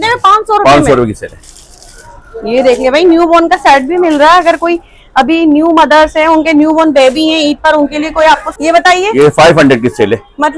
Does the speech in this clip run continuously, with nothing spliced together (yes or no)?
no